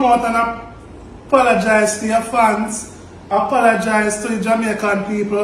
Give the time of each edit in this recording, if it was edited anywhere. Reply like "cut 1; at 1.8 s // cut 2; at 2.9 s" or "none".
none